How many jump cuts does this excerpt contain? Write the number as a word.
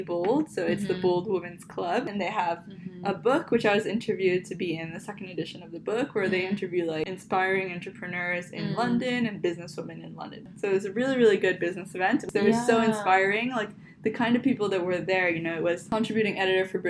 five